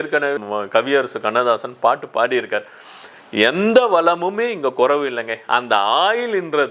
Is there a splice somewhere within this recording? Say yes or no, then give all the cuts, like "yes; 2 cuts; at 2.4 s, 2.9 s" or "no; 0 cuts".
no; 0 cuts